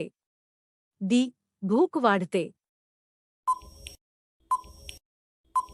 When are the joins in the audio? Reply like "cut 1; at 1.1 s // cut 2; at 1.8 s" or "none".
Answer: cut 1; at 3.3 s